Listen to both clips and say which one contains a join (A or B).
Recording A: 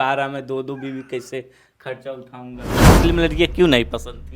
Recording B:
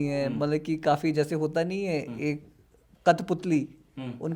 A